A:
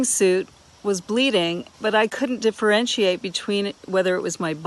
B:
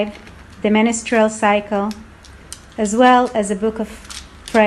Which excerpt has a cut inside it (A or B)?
A